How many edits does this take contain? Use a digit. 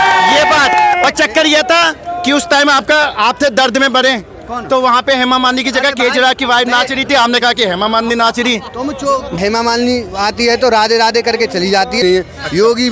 2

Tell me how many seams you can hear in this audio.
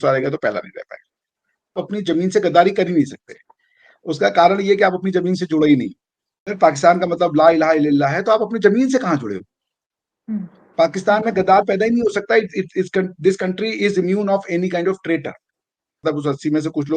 3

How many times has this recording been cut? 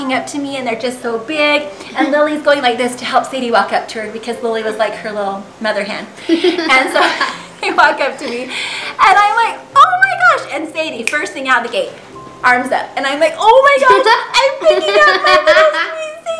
0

